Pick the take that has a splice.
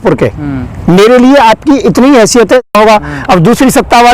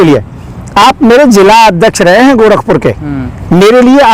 first; 1 cut; at 2.7 s

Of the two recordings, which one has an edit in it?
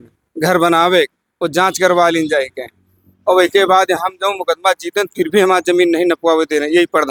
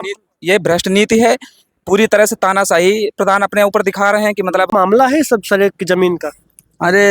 second; 1 cut; at 4.7 s

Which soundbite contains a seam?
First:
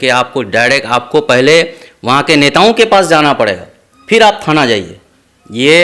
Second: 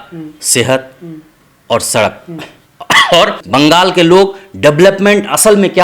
second; 1 cut; at 3.4 s

